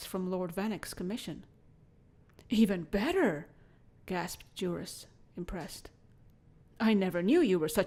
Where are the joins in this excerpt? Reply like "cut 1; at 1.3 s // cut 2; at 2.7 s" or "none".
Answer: none